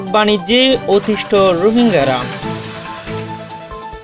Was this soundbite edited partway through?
yes; 1 cut; at 2.5 s

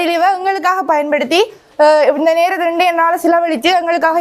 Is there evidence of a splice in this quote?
no; 0 cuts

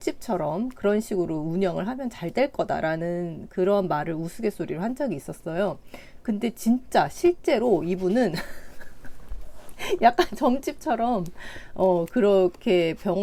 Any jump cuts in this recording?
no; 0 cuts

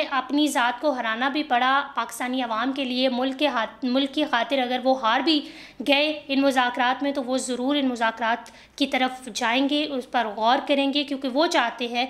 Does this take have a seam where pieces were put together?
no; 0 cuts

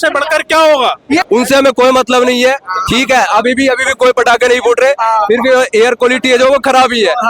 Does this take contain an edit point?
yes; 1 cut; at 1.3 s

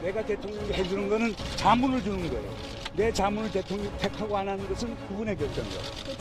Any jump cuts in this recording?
no; 0 cuts

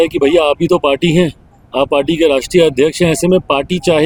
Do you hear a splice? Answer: no; 0 cuts

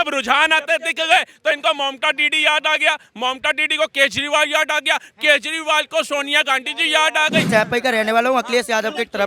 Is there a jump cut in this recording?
yes; 1 cut; at 7.5 s

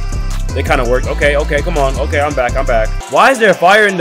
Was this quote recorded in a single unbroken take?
no; 1 cut; at 3.0 s

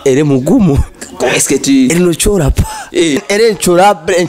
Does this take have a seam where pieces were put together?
yes; 1 cut; at 3.2 s

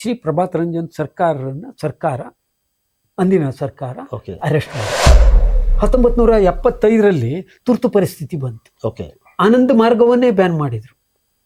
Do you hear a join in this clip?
no; 0 cuts

